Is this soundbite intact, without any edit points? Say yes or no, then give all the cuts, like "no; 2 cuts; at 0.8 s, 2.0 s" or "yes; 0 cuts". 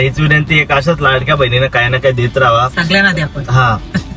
yes; 0 cuts